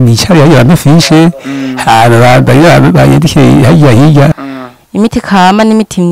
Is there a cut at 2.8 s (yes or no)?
no